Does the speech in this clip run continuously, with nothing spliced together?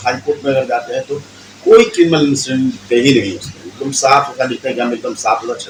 yes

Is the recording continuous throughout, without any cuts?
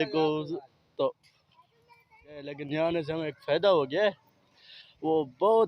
no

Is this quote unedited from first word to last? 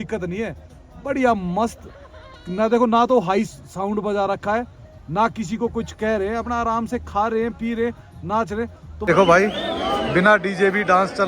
no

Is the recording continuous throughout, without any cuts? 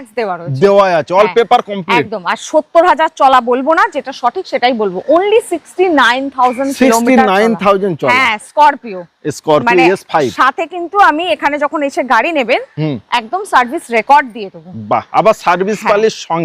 yes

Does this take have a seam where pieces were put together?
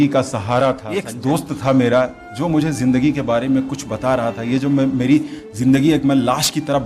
yes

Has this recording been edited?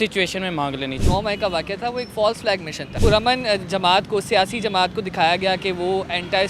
yes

